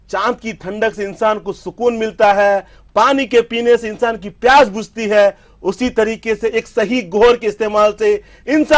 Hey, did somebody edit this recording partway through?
no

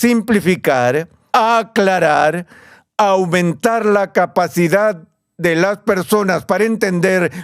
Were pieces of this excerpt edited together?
no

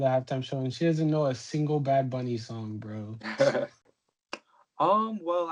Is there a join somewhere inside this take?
yes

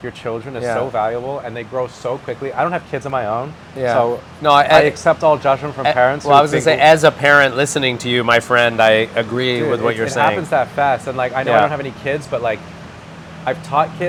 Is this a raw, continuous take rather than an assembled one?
yes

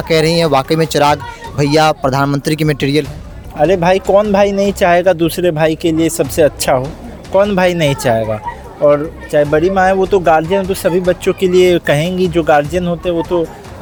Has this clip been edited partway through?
no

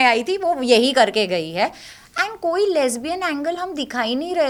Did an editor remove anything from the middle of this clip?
no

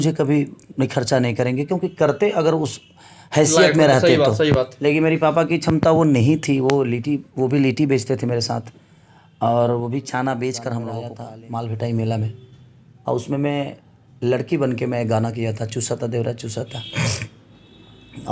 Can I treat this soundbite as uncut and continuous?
no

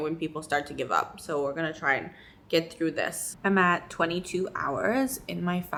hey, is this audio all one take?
yes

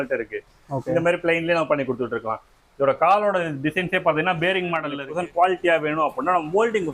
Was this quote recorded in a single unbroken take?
no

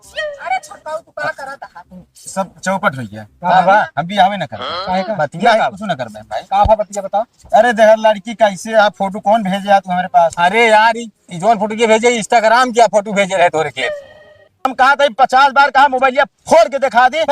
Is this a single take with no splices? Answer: no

